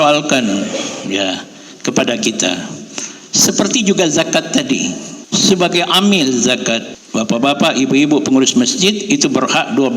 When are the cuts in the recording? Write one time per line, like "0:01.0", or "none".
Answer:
0:05.1
0:07.0